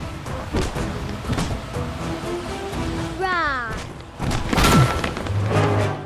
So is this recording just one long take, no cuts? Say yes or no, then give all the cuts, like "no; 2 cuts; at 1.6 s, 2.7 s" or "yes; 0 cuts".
yes; 0 cuts